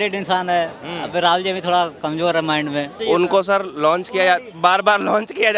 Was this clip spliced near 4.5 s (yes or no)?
no